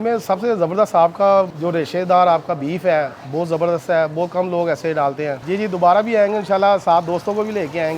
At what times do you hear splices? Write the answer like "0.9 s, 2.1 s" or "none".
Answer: 1.5 s, 3.2 s, 5.4 s